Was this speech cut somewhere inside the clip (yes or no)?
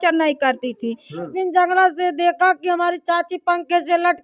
yes